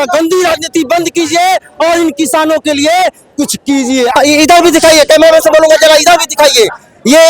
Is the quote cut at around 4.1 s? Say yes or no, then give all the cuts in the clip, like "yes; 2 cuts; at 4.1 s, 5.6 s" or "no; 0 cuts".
yes; 1 cut; at 4.1 s